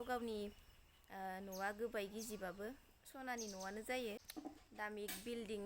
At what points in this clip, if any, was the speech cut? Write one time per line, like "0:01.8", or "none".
0:04.2